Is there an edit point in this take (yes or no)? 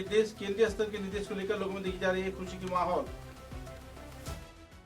yes